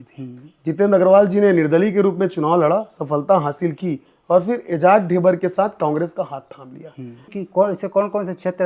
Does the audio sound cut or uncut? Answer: cut